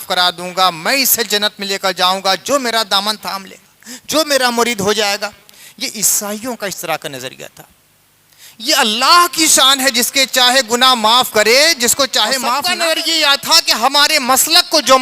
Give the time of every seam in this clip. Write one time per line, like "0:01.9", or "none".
0:12.7